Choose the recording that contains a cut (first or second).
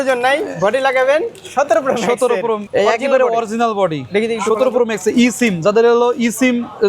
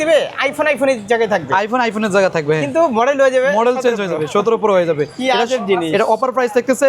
first